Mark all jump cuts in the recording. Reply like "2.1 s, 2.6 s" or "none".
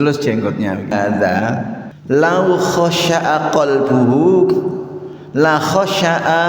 0.9 s

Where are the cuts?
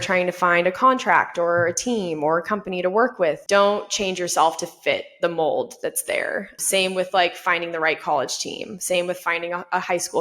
3.4 s, 6.5 s

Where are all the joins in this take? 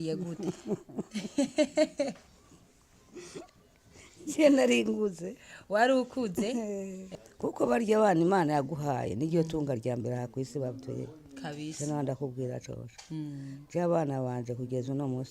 7.0 s

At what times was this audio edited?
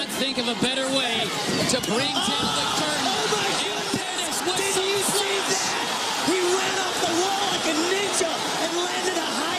1.3 s

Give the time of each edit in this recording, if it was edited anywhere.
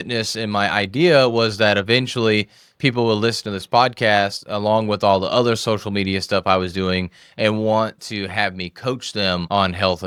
none

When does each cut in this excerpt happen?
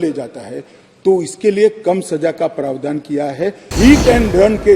3.7 s

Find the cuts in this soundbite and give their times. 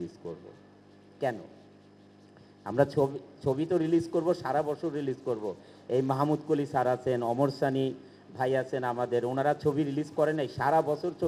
none

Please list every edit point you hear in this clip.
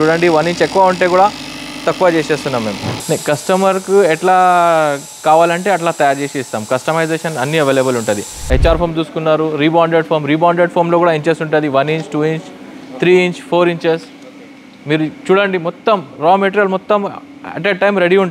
2.7 s, 8.3 s

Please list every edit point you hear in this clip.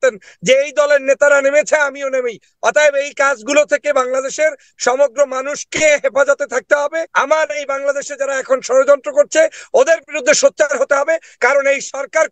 7.1 s

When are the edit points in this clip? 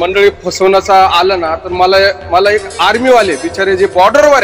none

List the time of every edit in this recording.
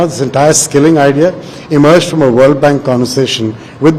none

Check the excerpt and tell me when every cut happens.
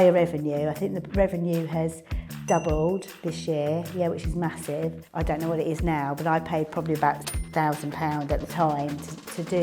5.0 s

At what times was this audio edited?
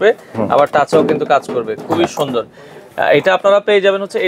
none

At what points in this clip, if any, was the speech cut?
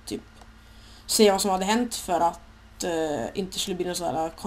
1.0 s

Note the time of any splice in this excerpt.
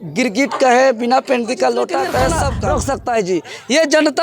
2.6 s

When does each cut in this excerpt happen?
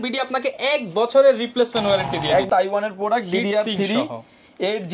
2.5 s

